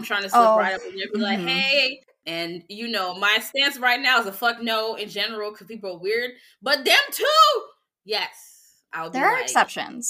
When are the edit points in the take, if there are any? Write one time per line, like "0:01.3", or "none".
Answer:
0:02.1